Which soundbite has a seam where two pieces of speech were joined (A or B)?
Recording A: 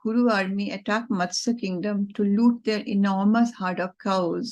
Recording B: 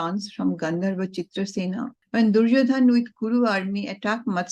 B